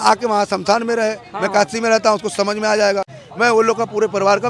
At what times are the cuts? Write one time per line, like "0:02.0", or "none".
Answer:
0:03.2